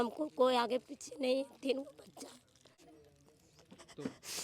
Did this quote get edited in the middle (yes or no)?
yes